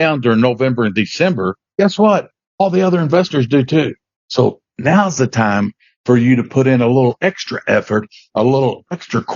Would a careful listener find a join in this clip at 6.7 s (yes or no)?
no